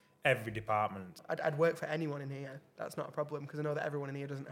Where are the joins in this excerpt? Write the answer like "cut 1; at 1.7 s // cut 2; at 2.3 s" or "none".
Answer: cut 1; at 1.2 s